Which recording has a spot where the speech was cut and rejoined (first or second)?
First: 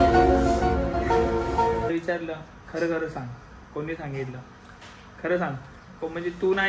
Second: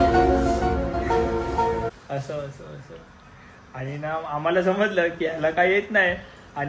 first